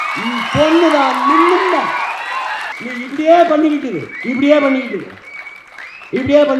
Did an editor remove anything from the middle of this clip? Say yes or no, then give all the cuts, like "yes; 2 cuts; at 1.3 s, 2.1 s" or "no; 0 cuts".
yes; 1 cut; at 2.7 s